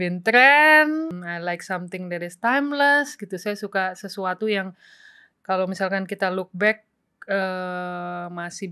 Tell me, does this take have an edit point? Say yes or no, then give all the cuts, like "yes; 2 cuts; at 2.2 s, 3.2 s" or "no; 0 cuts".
yes; 1 cut; at 1.2 s